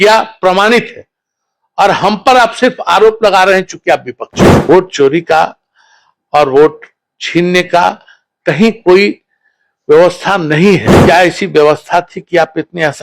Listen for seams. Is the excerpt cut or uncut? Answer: cut